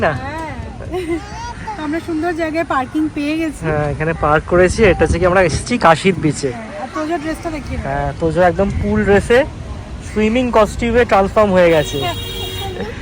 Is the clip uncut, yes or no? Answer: yes